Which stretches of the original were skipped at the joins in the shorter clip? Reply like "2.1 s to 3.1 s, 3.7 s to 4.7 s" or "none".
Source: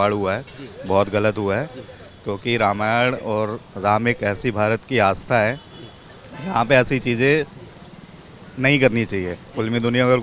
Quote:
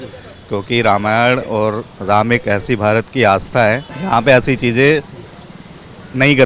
5.7 s to 6.3 s